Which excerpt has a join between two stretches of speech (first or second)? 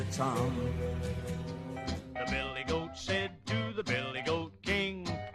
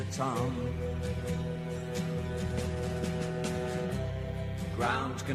first